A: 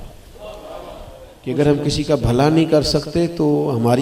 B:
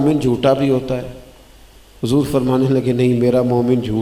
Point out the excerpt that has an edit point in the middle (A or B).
A